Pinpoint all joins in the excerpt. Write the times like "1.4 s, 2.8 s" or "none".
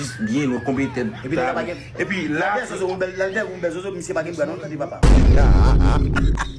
none